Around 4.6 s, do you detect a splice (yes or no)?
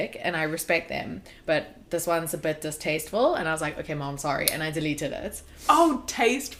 no